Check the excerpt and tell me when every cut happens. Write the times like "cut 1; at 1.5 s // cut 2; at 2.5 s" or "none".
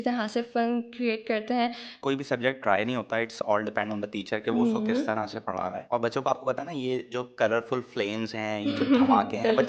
cut 1; at 2.0 s // cut 2; at 5.7 s